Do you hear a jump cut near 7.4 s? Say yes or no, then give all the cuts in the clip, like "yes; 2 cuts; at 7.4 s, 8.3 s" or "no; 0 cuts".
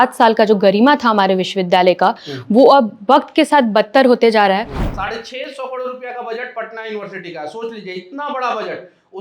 no; 1 cut; at 4.8 s